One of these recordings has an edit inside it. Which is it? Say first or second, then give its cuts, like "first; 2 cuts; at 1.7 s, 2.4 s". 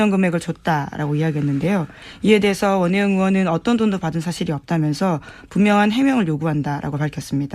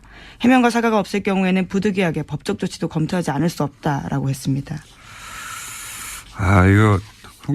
second; 1 cut; at 2.7 s